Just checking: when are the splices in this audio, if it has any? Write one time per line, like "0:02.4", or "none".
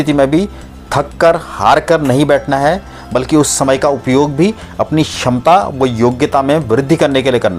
none